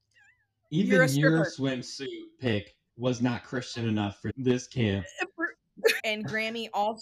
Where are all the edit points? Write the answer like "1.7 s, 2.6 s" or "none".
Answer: 4.2 s, 6.0 s